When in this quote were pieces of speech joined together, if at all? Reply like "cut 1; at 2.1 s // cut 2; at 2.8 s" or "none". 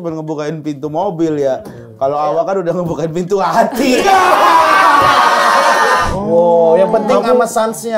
cut 1; at 6.1 s